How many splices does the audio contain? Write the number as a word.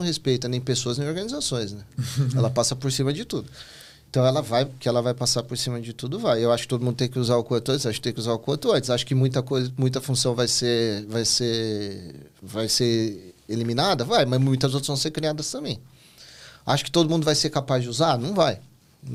zero